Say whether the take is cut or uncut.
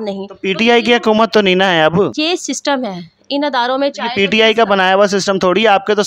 cut